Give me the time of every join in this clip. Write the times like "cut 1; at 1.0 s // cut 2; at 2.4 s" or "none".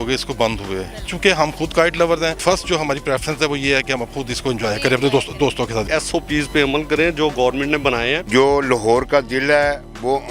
cut 1; at 1.1 s // cut 2; at 2.4 s // cut 3; at 5.9 s // cut 4; at 8.2 s